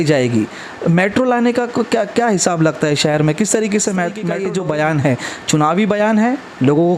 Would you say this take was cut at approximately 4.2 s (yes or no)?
yes